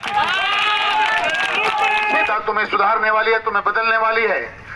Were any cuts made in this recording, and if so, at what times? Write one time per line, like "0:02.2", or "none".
0:02.3

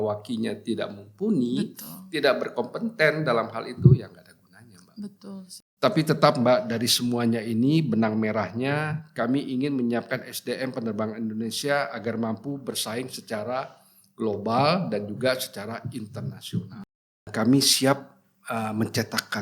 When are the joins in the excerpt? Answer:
0:05.6
0:17.3

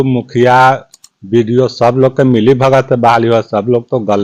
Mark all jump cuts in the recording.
none

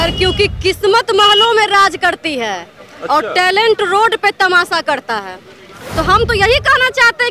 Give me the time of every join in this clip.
0:05.7

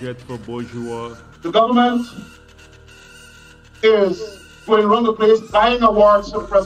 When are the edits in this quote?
0:01.2

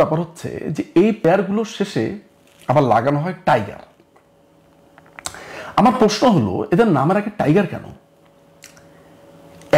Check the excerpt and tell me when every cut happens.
0:01.2

